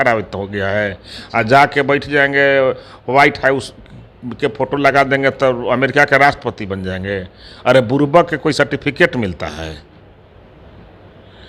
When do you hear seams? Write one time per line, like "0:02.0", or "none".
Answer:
none